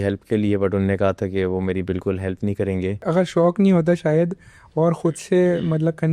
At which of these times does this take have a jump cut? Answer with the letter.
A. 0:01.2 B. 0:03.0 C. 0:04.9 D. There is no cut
B